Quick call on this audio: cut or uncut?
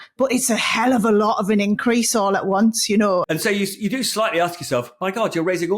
cut